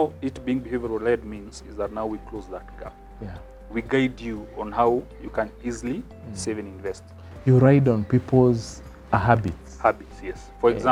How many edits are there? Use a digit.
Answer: 0